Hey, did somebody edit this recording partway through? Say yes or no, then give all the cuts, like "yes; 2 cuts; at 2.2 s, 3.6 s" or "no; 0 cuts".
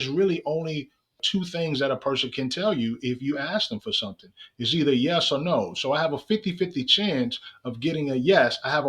yes; 1 cut; at 1.2 s